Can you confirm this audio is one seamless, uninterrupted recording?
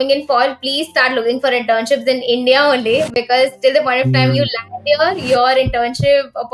yes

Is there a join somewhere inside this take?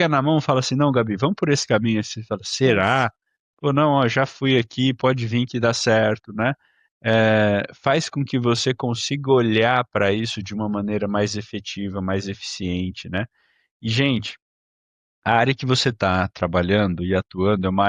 no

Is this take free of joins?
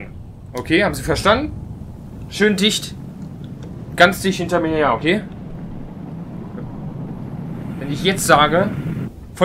yes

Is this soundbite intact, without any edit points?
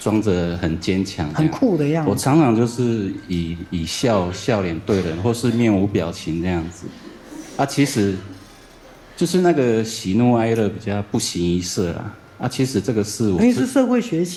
yes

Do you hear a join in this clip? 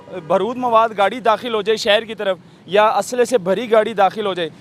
no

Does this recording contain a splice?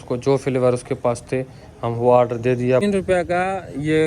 yes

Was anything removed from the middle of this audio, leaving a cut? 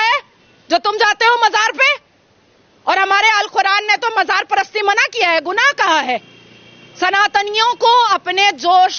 no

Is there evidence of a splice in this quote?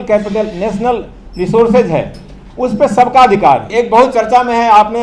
yes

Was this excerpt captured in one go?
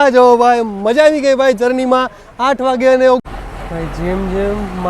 no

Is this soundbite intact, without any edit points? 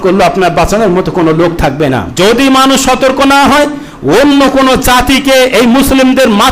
no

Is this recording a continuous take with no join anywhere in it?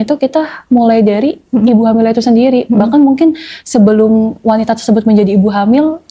yes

